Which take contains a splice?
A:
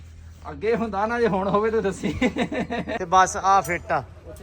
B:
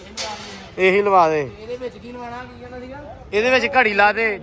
A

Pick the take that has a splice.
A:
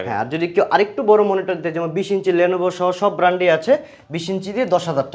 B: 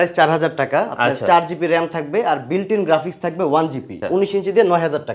B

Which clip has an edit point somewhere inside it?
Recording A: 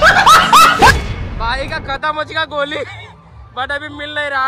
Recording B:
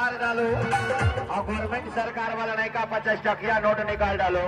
A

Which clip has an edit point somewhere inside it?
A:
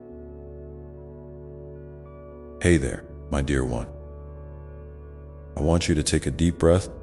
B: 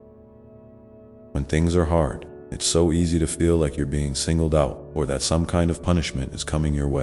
A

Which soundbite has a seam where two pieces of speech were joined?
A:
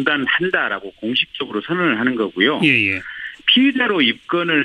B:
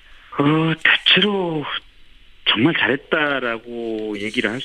A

